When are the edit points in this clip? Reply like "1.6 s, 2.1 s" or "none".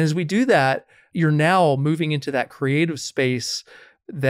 1.0 s

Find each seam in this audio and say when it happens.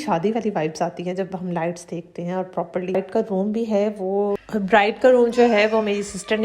3.0 s

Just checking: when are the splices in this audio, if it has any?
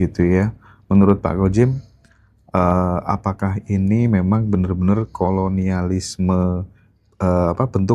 none

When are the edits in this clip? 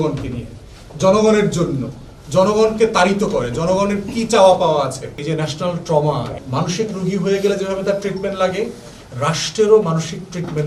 5.2 s, 6.4 s

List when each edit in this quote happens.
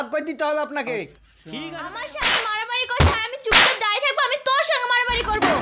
1.7 s

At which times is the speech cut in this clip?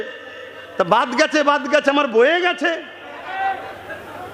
none

